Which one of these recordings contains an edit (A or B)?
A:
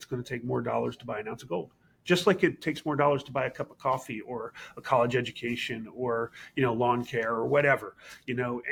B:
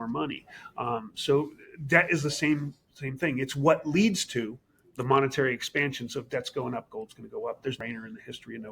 B